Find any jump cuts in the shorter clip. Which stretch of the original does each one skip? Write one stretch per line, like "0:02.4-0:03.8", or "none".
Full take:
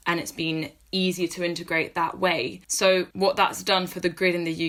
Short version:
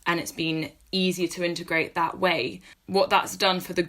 0:02.8-0:03.1